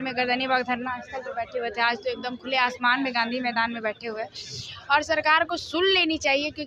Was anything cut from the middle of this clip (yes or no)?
no